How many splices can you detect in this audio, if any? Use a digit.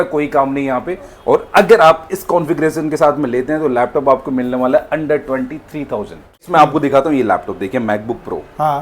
1